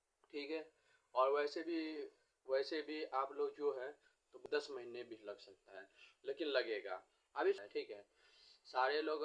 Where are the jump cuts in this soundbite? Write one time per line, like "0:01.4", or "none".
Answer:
0:04.4
0:07.6